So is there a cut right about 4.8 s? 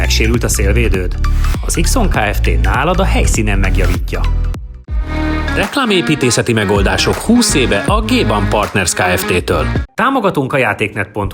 yes; 2 cuts; at 4.8 s, 9.8 s

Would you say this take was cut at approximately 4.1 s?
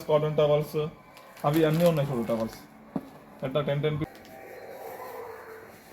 yes; 1 cut; at 4.1 s

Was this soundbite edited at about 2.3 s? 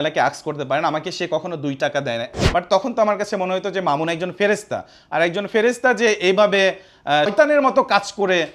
yes; 2 cuts; at 2.3 s, 7.3 s

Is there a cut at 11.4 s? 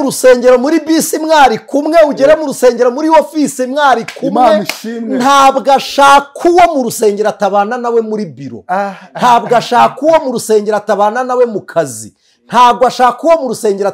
no; 0 cuts

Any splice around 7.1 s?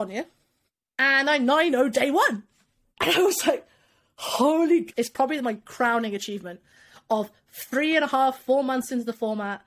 no; 1 cut; at 4.9 s

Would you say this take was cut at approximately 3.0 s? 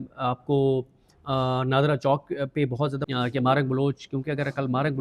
yes; 1 cut; at 3.0 s

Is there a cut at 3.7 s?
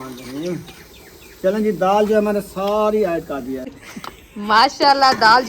yes; 1 cut; at 3.7 s

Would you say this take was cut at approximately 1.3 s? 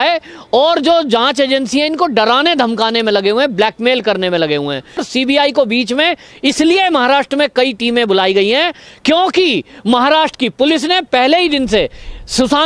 no; 1 cut; at 5.0 s

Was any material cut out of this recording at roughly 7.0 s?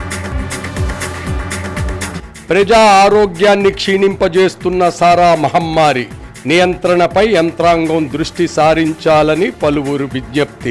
no; 1 cut; at 2.1 s

